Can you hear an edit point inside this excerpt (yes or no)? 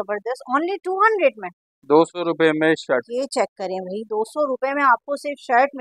no